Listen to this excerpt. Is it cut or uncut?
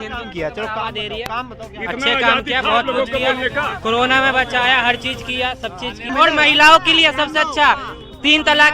cut